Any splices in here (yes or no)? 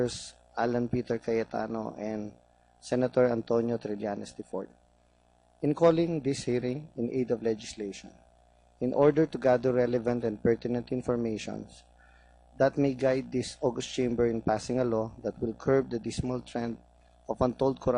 yes